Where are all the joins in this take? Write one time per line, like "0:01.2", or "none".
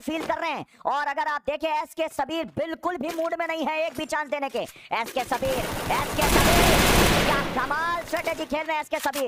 none